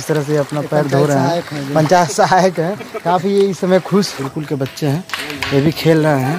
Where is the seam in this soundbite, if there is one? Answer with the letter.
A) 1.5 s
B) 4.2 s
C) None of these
B